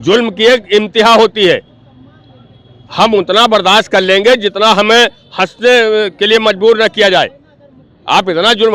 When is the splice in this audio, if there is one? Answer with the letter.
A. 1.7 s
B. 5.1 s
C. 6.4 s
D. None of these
D